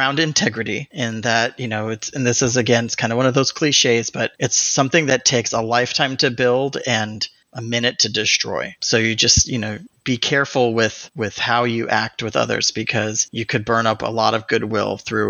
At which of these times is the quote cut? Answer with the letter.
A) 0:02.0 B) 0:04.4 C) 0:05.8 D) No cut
A